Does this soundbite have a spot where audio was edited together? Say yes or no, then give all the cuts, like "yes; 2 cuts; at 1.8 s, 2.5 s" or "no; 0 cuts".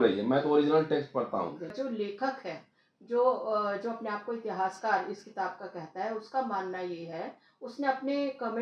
yes; 1 cut; at 1.6 s